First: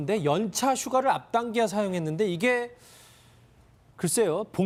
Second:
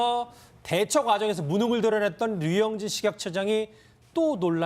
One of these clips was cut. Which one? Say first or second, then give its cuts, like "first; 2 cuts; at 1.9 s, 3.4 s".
second; 1 cut; at 1.2 s